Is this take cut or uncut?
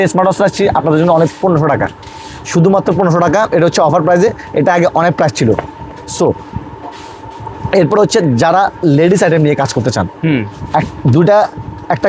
uncut